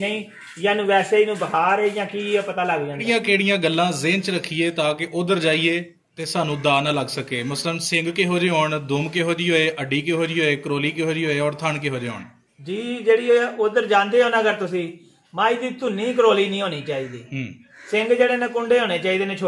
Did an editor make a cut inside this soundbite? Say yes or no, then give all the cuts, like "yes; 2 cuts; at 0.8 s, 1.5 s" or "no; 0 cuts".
yes; 1 cut; at 3.0 s